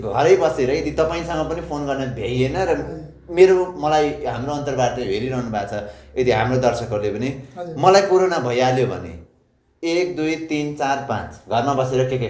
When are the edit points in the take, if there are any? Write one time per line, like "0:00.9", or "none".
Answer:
none